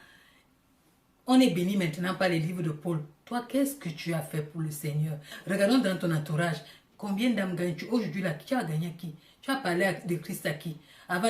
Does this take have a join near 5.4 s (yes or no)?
yes